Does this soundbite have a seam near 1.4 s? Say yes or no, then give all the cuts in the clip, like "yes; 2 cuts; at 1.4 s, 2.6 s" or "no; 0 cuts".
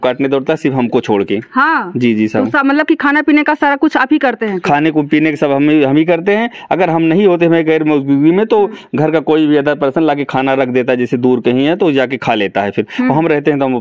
no; 0 cuts